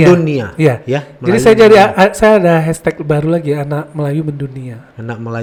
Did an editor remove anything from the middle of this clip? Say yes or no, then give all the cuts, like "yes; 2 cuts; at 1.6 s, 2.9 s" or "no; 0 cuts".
no; 0 cuts